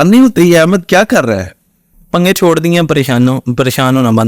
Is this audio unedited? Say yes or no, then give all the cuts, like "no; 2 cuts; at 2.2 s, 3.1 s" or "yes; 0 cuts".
yes; 0 cuts